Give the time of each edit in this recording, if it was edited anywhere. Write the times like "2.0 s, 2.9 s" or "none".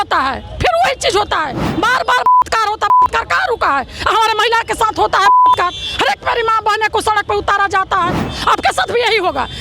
8.2 s